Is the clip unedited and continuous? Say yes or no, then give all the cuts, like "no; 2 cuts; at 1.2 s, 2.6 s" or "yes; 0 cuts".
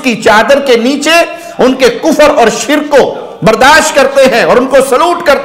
yes; 0 cuts